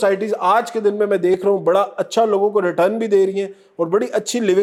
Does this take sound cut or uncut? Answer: uncut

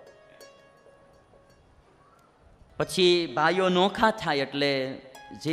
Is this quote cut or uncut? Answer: cut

